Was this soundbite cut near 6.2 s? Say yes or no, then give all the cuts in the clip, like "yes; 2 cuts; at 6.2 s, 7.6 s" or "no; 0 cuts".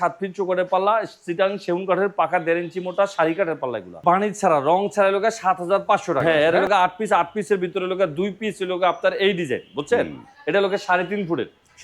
yes; 2 cuts; at 4.0 s, 6.2 s